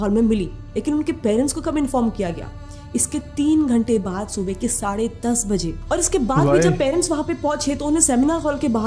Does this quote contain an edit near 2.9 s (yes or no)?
no